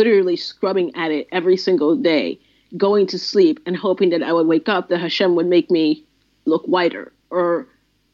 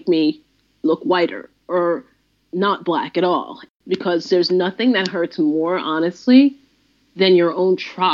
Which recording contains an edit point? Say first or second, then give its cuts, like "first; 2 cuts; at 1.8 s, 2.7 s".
second; 1 cut; at 3.6 s